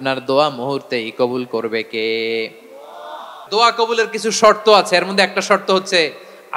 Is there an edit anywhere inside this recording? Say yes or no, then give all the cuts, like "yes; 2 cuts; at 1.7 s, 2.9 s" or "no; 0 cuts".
yes; 1 cut; at 3.4 s